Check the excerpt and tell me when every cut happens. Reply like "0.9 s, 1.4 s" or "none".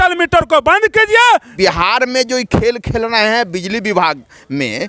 1.5 s

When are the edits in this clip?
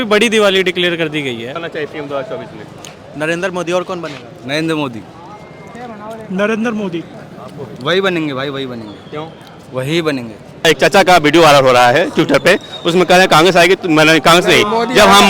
1.6 s, 10.7 s

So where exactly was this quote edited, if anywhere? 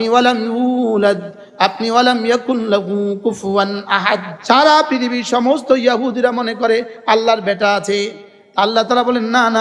4.3 s

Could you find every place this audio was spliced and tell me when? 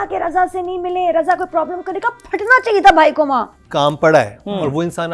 3.6 s

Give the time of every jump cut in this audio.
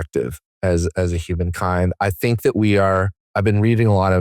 3.2 s

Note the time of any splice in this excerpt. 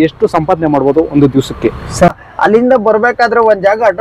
2.1 s

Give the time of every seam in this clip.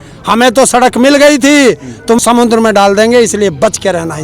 2.2 s

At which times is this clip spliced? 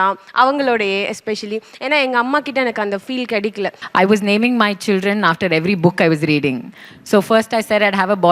3.7 s

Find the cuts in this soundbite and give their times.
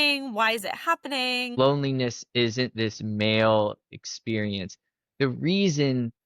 1.6 s

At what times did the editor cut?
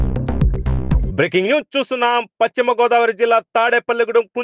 1.1 s

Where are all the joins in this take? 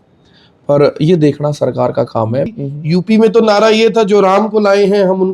2.6 s

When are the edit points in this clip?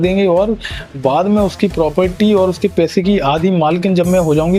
none

